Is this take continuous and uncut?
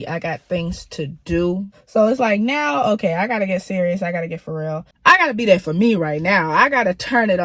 no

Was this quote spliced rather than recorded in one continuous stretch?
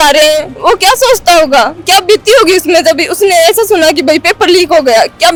no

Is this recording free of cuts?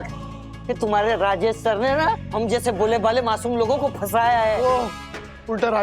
no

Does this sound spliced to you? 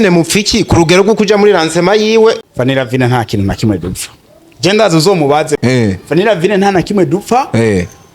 yes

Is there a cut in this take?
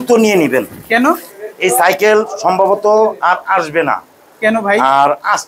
no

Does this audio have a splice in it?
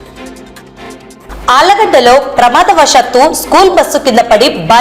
yes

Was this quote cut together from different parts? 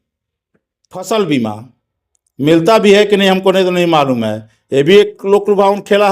yes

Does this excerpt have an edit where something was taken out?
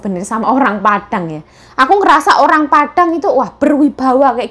no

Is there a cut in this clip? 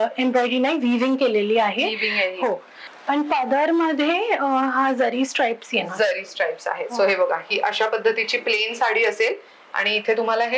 yes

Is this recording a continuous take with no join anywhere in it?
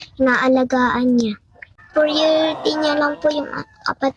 no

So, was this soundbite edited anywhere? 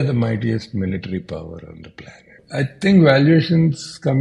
yes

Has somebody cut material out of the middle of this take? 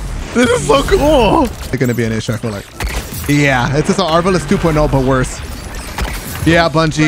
yes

